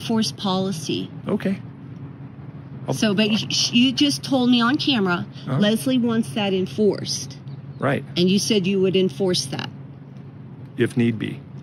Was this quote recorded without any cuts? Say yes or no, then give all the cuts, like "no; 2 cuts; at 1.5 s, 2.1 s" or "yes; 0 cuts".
yes; 0 cuts